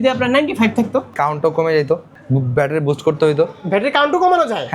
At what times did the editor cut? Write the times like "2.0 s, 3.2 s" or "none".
1.1 s, 2.1 s